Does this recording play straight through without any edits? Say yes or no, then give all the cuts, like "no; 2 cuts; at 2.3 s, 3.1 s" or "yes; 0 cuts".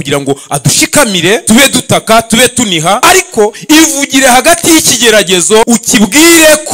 no; 3 cuts; at 1.4 s, 3.0 s, 5.7 s